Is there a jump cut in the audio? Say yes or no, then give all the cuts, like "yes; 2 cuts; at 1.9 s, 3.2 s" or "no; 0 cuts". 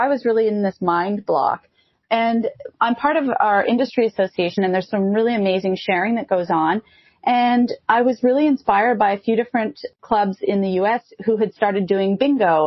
yes; 1 cut; at 4.7 s